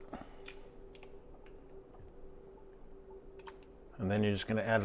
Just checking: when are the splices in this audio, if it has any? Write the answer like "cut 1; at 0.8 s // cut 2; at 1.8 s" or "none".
cut 1; at 2.1 s // cut 2; at 3.9 s